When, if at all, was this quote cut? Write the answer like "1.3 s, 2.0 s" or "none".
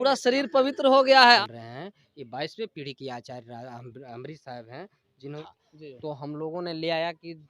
1.4 s, 5.4 s